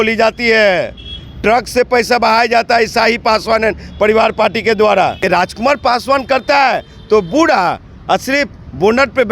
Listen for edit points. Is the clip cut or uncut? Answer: cut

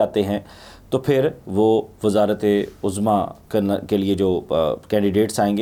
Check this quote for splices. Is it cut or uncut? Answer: uncut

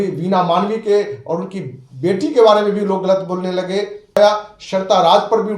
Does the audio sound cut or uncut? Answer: cut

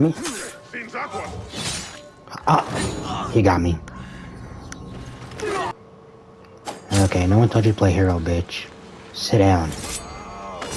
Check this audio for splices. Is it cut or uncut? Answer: cut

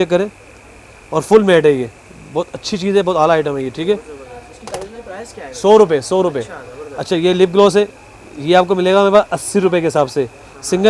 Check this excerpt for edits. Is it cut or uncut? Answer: uncut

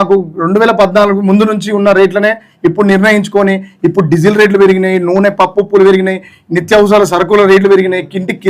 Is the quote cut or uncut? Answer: uncut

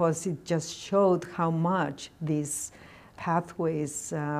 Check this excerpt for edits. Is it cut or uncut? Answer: cut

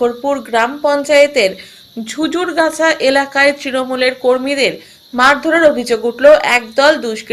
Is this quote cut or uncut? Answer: uncut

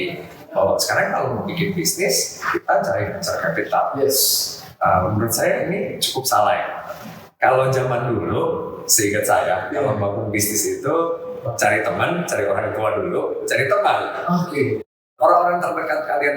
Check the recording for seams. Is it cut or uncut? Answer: cut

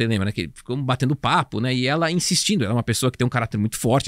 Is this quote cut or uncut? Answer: uncut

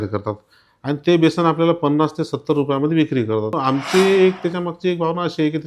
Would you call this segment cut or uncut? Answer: cut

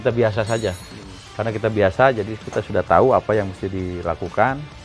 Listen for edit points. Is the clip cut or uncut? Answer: uncut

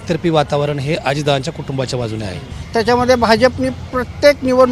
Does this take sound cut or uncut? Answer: cut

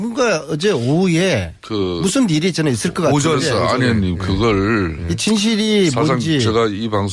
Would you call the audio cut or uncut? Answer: cut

